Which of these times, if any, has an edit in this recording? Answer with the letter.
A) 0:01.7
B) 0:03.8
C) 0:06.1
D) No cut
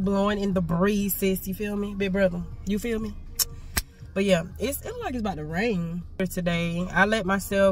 D